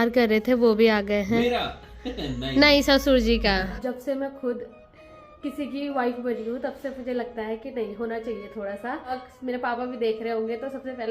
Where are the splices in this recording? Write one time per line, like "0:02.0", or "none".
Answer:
0:03.8
0:09.2